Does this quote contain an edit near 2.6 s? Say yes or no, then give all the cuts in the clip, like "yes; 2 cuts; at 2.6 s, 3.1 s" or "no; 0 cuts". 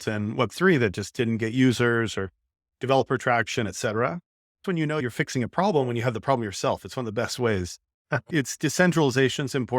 no; 2 cuts; at 4.9 s, 8.2 s